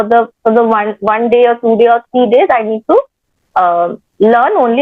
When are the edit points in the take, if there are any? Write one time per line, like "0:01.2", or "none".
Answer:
none